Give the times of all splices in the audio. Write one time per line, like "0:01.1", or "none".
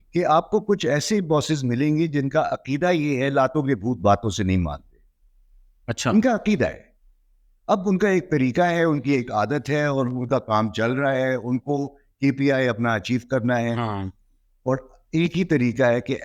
none